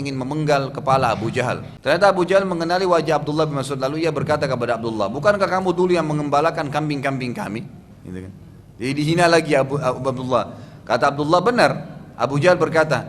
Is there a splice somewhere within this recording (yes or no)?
yes